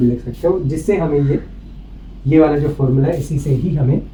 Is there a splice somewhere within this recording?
no; 0 cuts

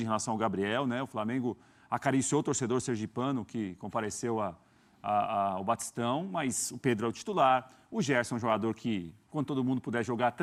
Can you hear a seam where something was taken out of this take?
no; 0 cuts

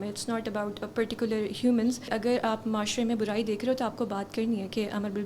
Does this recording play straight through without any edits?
no; 1 cut; at 2.1 s

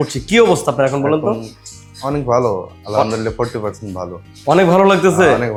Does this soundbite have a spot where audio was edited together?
no; 0 cuts

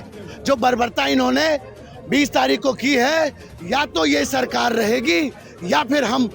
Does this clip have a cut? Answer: no; 0 cuts

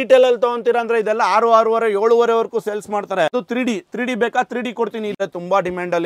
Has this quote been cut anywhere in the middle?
yes; 2 cuts; at 3.3 s, 5.1 s

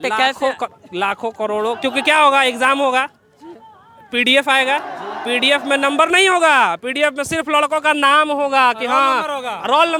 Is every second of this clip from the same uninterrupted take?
yes; 0 cuts

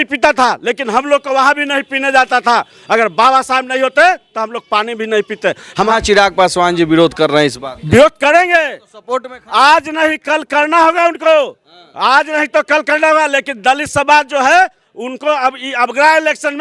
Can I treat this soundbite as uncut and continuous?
no; 1 cut; at 5.9 s

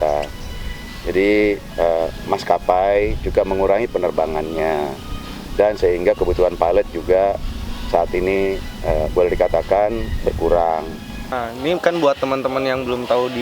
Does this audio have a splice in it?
yes; 1 cut; at 11.4 s

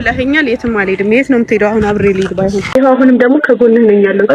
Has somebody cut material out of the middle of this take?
yes; 1 cut; at 2.8 s

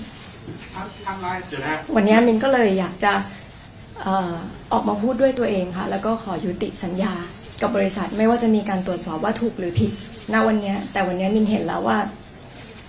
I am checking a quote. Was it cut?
no; 0 cuts

